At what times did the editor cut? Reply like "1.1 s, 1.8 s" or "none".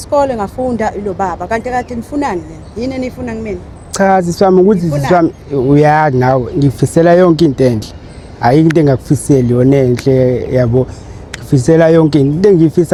none